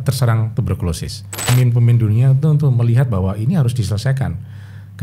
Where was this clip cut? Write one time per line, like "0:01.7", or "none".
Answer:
0:01.5